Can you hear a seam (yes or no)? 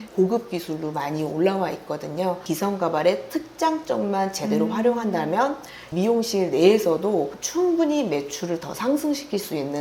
yes